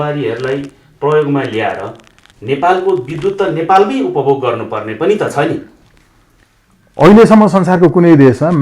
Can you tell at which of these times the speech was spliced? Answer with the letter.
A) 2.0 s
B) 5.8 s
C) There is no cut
B